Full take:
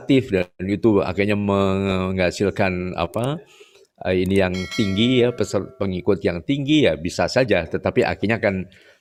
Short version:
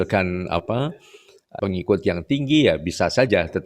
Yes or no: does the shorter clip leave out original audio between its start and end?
yes